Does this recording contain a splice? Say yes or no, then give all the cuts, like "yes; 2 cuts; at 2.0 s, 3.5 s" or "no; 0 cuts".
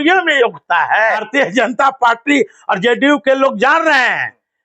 yes; 1 cut; at 1.2 s